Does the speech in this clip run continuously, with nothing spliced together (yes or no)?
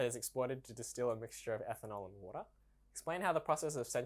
no